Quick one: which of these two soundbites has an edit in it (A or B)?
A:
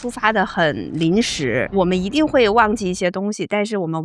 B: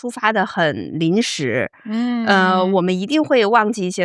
A